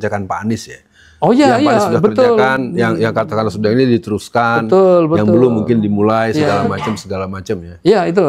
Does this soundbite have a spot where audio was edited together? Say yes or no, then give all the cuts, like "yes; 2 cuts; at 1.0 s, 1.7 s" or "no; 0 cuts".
no; 0 cuts